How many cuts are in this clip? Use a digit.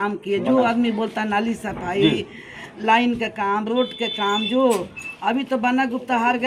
0